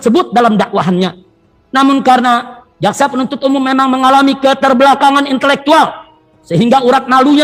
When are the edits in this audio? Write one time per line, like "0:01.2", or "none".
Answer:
none